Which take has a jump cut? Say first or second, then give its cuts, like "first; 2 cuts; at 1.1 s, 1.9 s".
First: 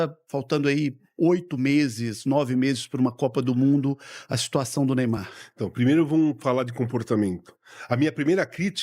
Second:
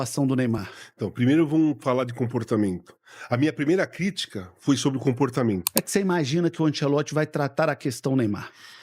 second; 1 cut; at 5.7 s